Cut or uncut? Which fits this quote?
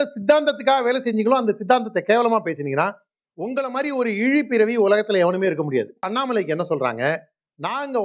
cut